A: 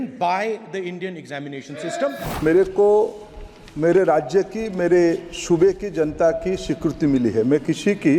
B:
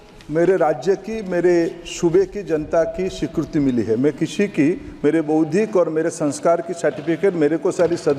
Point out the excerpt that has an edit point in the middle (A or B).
A